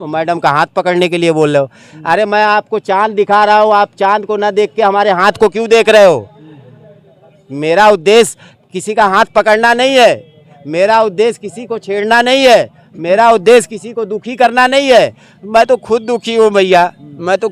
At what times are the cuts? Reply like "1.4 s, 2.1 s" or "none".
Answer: none

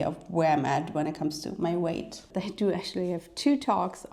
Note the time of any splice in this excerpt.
2.2 s

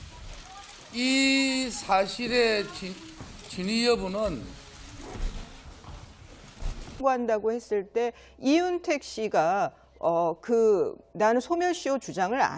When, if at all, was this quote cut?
none

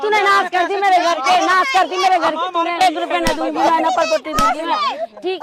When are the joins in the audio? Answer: 2.8 s

